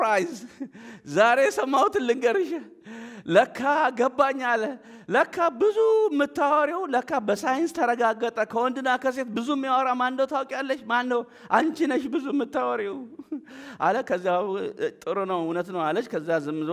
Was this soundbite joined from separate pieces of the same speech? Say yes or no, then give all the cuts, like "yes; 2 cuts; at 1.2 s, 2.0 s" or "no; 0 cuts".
no; 0 cuts